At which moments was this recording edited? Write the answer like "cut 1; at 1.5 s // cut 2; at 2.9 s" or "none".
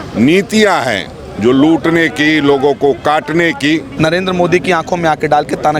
cut 1; at 3.9 s